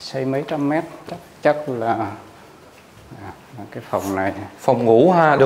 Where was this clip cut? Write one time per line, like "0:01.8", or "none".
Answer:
none